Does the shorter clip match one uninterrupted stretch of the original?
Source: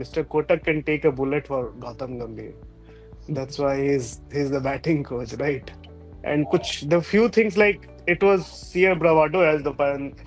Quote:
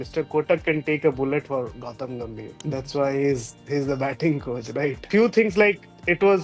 no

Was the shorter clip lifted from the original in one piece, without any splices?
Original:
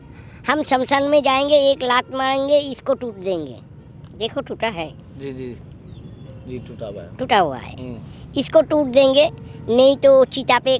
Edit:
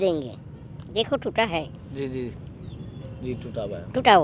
yes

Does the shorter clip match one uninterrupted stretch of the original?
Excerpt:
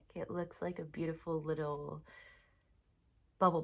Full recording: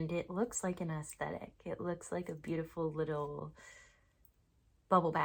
yes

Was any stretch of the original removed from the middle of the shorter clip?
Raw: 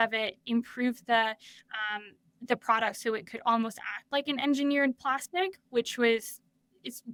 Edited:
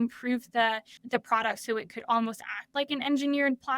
yes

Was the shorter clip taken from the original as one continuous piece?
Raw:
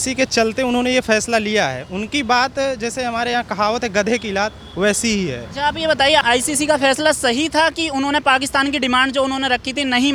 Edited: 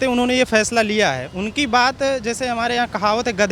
yes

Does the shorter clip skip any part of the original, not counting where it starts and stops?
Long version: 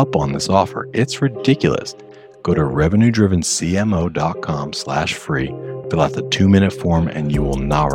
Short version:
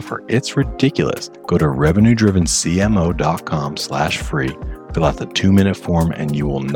yes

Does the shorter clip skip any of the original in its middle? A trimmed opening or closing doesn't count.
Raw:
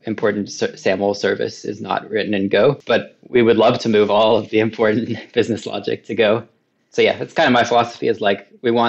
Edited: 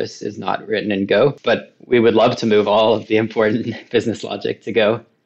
no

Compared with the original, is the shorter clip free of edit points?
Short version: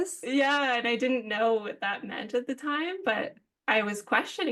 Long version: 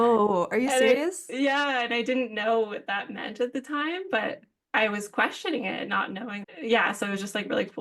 yes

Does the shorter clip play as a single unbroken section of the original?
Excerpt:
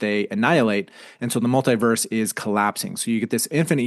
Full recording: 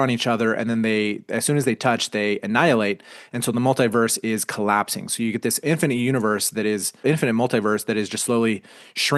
yes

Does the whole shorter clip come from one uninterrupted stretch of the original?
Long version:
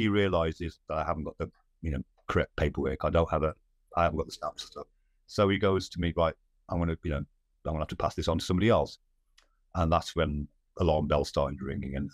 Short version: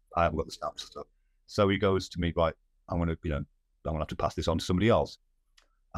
yes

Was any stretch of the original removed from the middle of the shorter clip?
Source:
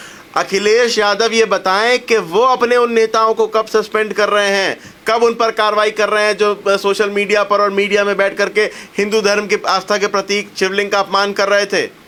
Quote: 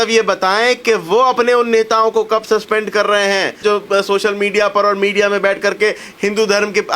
yes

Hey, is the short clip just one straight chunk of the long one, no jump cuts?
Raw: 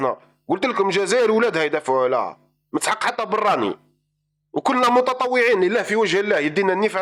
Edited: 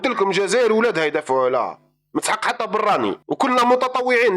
no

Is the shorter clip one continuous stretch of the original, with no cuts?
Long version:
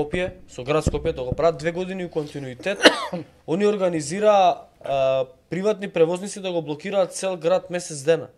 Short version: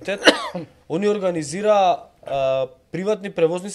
yes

